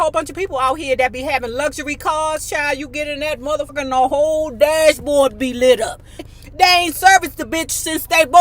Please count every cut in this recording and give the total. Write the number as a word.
two